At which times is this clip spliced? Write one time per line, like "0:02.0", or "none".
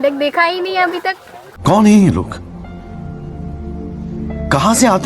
0:01.6